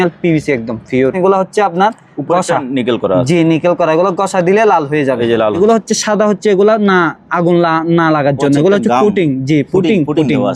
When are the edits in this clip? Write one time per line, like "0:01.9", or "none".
0:01.2
0:05.6